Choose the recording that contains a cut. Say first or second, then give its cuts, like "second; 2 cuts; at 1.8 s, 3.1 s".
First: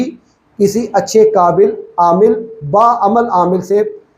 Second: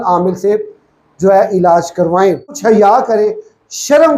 second; 1 cut; at 2.6 s